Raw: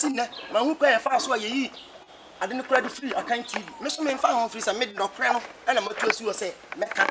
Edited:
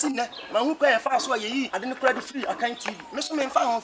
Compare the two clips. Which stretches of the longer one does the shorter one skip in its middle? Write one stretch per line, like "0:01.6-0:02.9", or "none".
0:01.7-0:02.4